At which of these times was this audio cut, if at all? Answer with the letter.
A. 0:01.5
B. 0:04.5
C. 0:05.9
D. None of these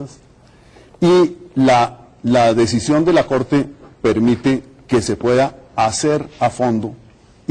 A